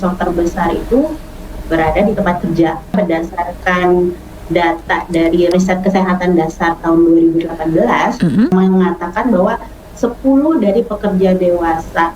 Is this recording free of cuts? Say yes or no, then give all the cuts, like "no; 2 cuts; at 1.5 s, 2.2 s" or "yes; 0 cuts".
no; 3 cuts; at 2.9 s, 5.5 s, 8.5 s